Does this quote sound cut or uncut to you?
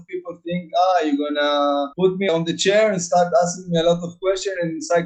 uncut